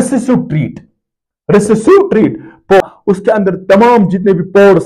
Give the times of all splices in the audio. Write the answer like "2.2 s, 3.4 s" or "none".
2.8 s